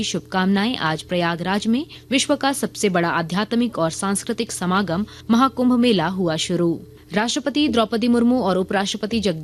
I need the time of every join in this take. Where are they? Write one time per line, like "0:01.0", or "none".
0:01.9
0:05.1